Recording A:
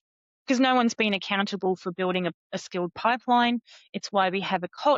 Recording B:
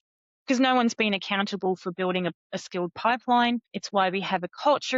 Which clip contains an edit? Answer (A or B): B